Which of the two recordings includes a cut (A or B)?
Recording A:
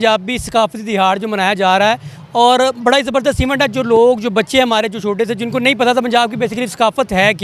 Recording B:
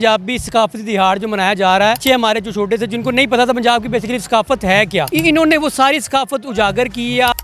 B